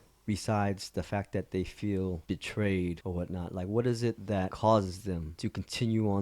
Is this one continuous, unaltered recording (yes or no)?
no